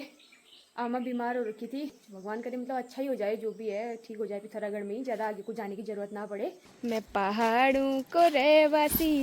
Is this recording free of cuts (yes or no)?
no